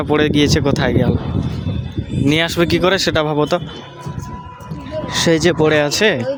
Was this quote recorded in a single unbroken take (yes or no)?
yes